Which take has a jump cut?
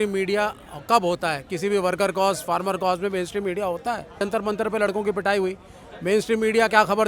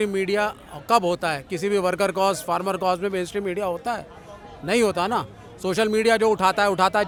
first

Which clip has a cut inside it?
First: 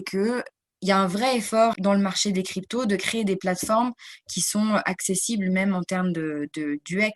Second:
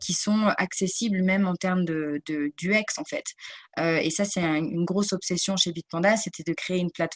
first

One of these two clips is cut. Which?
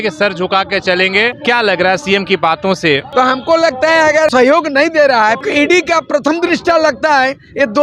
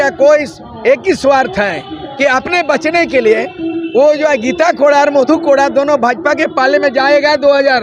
first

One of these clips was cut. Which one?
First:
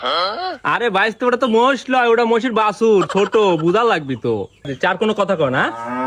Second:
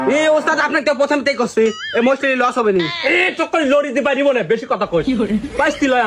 first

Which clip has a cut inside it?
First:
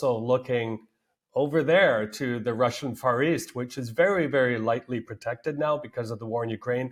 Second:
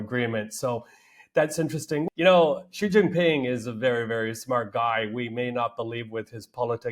second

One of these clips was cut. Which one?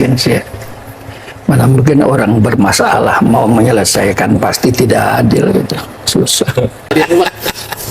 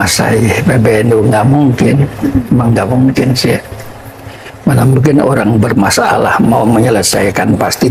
first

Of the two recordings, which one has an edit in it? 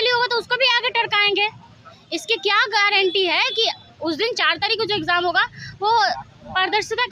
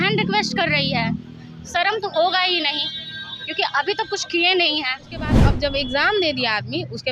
second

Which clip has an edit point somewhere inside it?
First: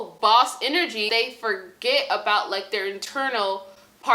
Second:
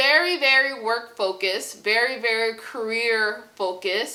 first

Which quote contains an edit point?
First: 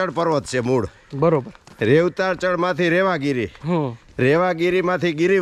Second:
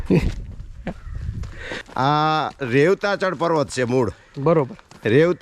second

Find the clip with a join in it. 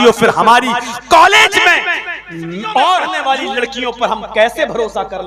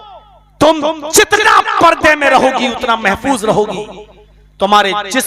first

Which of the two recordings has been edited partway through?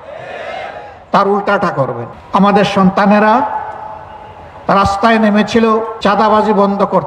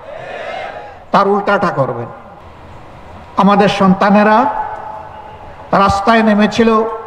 first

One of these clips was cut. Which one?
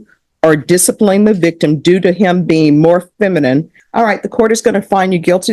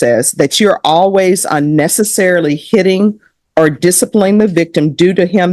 first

